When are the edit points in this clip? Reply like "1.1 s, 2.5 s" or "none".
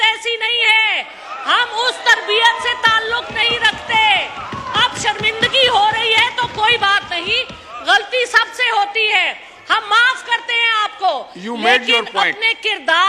none